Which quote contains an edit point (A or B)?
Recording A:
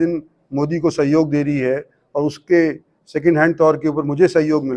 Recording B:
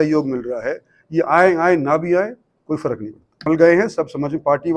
B